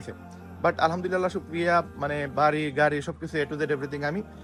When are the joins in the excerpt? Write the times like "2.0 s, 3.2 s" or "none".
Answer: none